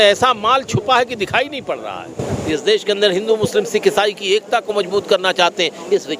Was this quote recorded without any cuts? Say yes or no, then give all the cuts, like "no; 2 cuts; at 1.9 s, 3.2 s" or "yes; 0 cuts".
no; 1 cut; at 2.4 s